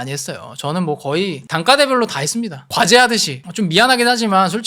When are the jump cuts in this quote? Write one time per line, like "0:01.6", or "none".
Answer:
0:02.6